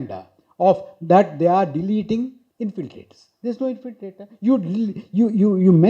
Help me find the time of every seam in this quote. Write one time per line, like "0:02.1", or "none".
0:02.4